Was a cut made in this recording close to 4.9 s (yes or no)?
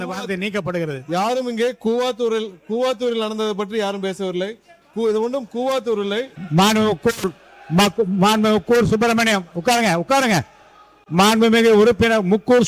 no